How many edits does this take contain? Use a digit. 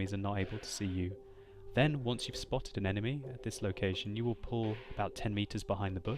1